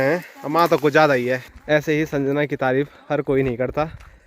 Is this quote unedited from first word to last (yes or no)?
no